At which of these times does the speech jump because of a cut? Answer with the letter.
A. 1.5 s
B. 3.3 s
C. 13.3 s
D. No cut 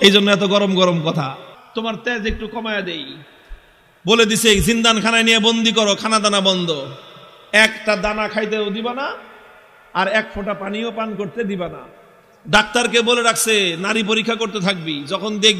A